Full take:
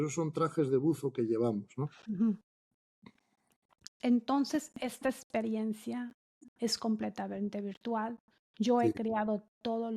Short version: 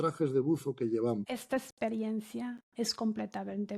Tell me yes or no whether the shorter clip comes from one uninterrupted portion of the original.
no